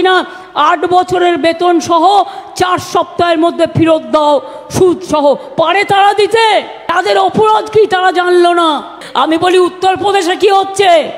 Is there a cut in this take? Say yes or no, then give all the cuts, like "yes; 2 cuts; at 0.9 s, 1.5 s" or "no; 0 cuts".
yes; 2 cuts; at 6.8 s, 9.0 s